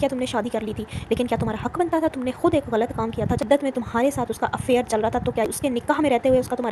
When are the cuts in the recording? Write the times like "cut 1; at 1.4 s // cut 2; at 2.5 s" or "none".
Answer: cut 1; at 3.4 s // cut 2; at 5.5 s

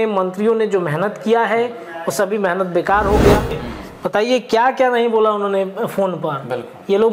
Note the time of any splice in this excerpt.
cut 1; at 3.7 s

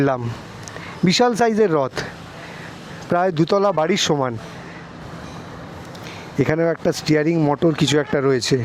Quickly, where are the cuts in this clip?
none

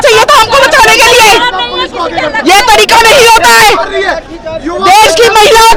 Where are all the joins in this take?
none

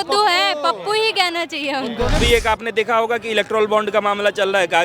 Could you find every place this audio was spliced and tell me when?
cut 1; at 2.2 s

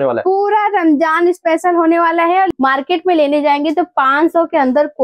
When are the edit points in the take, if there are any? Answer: cut 1; at 2.5 s

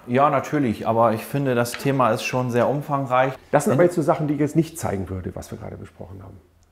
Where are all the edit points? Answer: cut 1; at 3.3 s

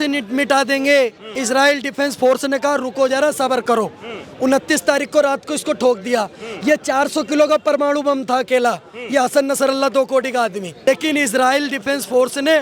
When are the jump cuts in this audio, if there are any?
cut 1; at 1.3 s // cut 2; at 10.8 s

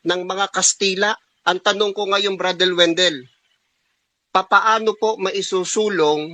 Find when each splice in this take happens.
cut 1; at 1.3 s

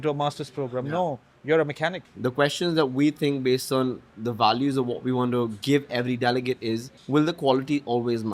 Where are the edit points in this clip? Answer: cut 1; at 2.1 s // cut 2; at 6.9 s

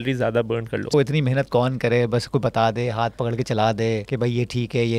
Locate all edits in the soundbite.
cut 1; at 0.9 s // cut 2; at 4.1 s

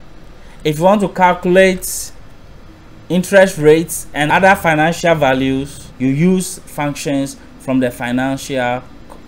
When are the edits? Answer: cut 1; at 5.8 s

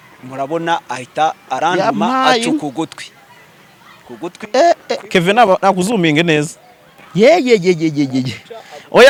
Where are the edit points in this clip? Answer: none

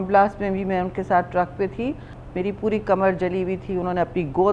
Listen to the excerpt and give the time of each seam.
cut 1; at 2.2 s

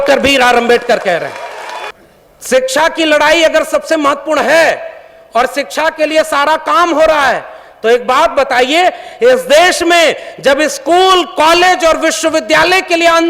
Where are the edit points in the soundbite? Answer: cut 1; at 1.9 s

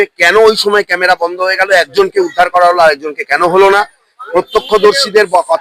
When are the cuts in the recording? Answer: none

